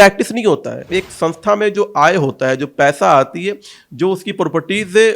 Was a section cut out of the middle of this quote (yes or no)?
yes